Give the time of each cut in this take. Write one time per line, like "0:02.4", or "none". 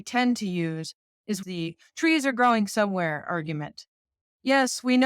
0:01.4